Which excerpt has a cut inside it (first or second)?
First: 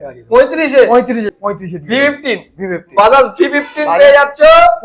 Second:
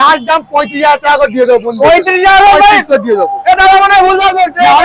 first